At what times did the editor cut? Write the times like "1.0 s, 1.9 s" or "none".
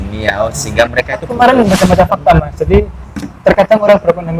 1.3 s